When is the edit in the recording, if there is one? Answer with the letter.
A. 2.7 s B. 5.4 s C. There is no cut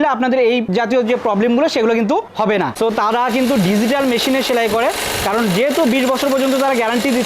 A